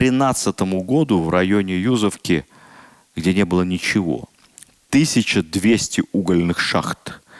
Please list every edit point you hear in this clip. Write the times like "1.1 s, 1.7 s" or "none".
none